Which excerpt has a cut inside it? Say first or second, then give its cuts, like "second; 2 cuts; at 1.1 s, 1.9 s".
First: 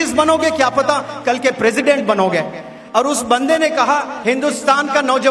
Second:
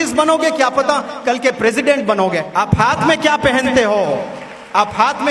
second; 1 cut; at 2.5 s